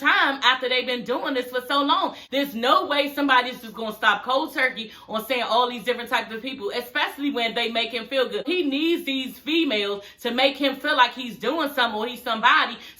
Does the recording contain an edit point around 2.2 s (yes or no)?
yes